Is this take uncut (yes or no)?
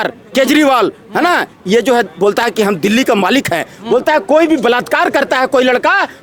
yes